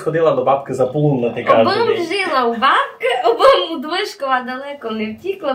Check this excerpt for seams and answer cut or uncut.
uncut